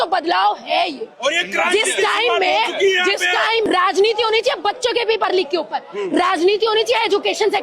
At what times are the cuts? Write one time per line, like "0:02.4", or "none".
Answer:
0:03.6